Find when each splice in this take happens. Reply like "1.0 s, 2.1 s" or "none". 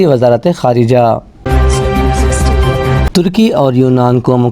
1.4 s, 3.1 s